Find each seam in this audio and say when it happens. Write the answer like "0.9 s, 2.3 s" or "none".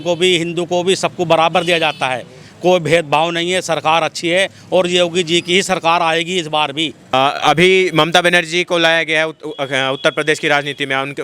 7.1 s